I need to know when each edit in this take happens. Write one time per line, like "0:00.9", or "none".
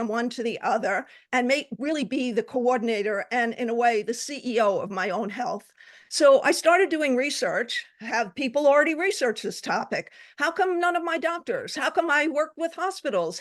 none